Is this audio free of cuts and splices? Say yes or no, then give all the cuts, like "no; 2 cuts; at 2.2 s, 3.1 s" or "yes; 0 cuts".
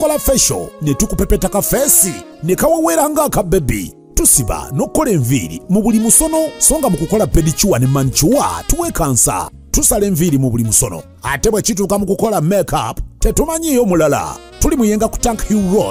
yes; 0 cuts